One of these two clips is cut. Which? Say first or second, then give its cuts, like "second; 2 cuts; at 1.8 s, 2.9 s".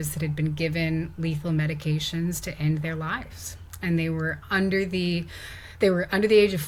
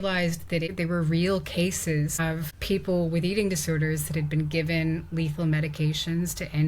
second; 2 cuts; at 0.7 s, 2.2 s